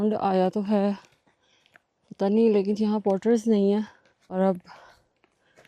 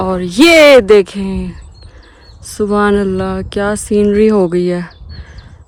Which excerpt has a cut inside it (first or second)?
first